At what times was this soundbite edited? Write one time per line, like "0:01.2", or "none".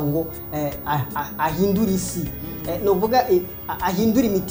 none

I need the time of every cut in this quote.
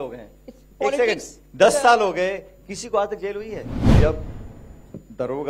0:03.8

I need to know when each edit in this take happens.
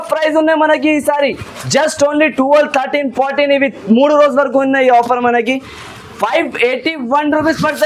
none

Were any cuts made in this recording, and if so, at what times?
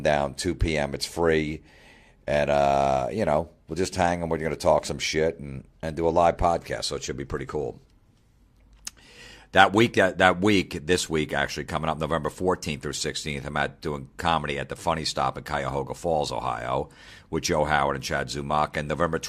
0:15.1

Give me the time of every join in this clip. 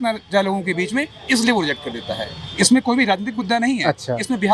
none

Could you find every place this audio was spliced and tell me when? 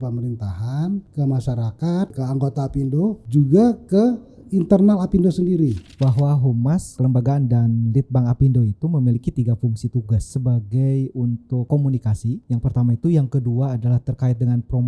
0:01.1
0:02.2
0:03.2
0:05.9
0:06.9
0:10.3
0:11.7
0:12.4

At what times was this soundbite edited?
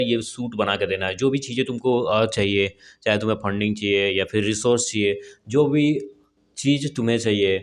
none

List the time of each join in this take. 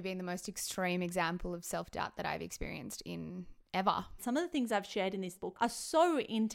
0:04.2
0:05.3

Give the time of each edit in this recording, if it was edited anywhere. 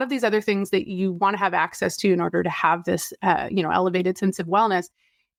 none

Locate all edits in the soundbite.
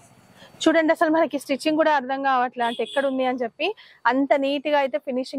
none

